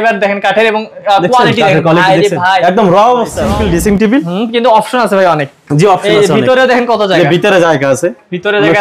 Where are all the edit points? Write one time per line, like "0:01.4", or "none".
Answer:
0:03.5